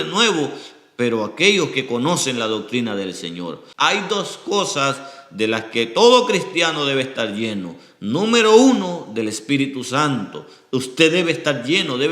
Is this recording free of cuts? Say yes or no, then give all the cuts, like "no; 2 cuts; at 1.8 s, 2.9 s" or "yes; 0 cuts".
no; 1 cut; at 3.6 s